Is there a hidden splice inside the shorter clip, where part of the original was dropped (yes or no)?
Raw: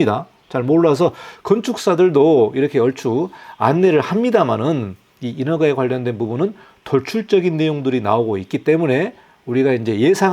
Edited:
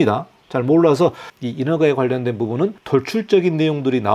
yes